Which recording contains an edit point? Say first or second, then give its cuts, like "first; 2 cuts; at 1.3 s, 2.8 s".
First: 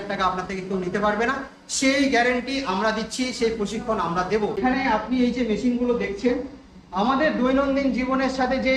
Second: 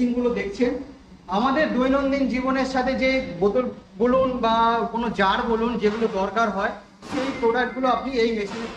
first; 1 cut; at 4.6 s